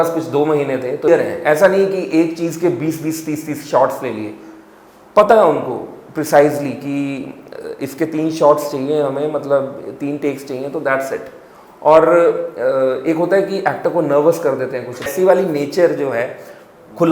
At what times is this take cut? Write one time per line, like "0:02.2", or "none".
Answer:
0:01.1
0:15.1

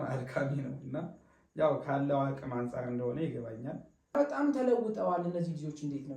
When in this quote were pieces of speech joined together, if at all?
0:04.1

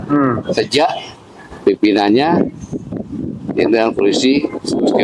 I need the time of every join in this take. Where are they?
none

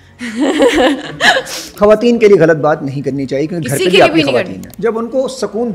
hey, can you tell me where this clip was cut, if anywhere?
0:01.6
0:04.6

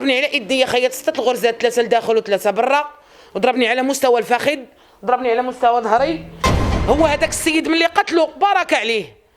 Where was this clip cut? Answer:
0:06.4

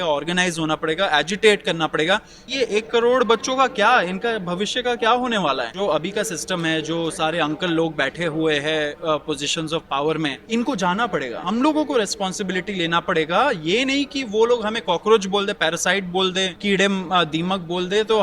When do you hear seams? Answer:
0:02.4
0:05.7
0:10.4
0:11.4
0:16.5

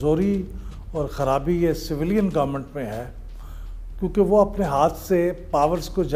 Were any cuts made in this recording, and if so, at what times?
none

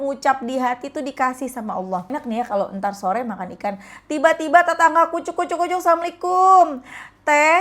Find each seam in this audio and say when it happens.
0:02.1

